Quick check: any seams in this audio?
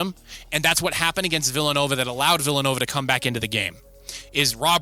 no; 0 cuts

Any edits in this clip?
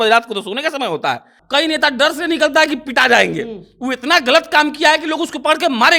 yes; 1 cut; at 1.4 s

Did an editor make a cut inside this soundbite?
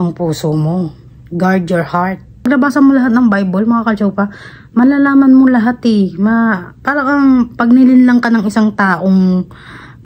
yes; 1 cut; at 2.4 s

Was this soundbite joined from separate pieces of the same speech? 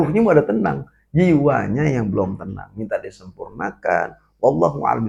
no; 0 cuts

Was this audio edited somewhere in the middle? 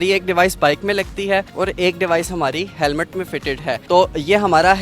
no; 0 cuts

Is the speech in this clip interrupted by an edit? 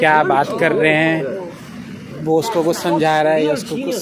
no; 0 cuts

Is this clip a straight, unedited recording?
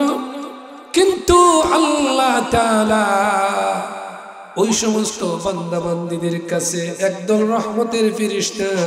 yes; 0 cuts

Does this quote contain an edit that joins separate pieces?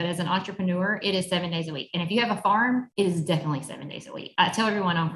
yes; 2 cuts; at 2.9 s, 4.2 s

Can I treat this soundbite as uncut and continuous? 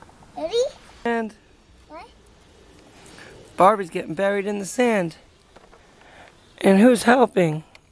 no; 1 cut; at 1.0 s

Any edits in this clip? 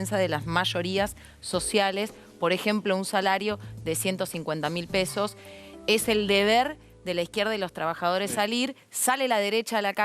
no; 0 cuts

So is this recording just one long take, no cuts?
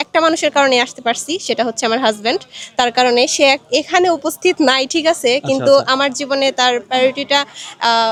yes; 0 cuts

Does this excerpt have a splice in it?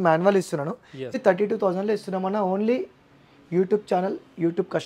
yes; 1 cut; at 1.1 s

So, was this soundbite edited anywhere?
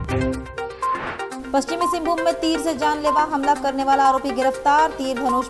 no; 0 cuts

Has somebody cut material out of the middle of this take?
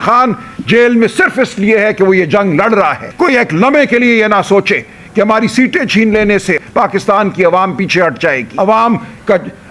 yes; 3 cuts; at 3.0 s, 6.6 s, 8.5 s

